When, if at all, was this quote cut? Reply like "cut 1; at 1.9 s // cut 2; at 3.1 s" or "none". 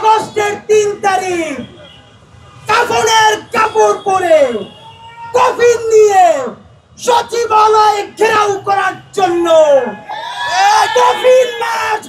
none